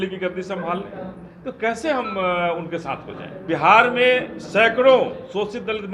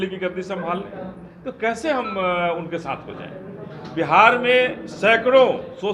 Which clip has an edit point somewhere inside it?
first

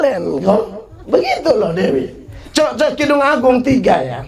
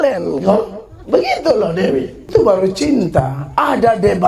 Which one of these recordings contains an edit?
second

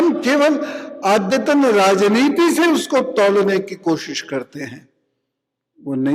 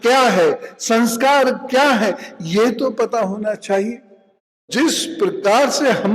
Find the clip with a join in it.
second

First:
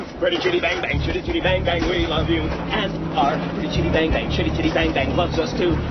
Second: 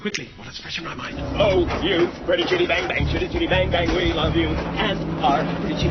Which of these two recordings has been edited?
second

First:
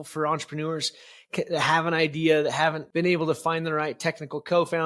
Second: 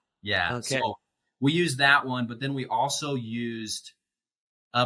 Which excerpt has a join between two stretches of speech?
first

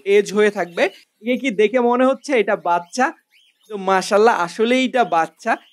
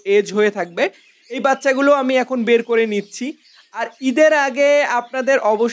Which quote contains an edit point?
first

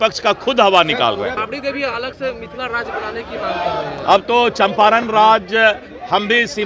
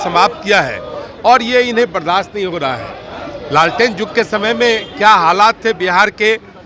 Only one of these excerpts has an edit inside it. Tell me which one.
first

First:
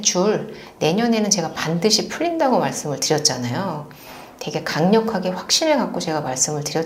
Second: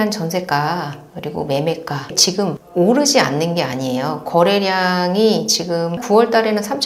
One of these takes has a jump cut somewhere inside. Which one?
second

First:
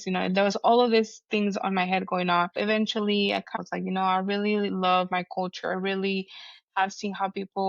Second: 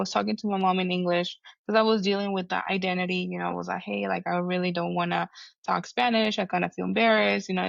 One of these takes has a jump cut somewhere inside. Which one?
first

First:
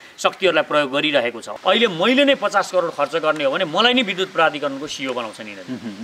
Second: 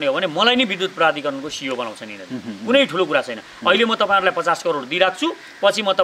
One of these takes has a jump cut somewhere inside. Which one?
first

